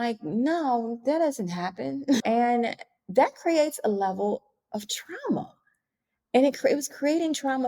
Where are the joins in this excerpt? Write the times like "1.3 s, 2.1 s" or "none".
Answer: none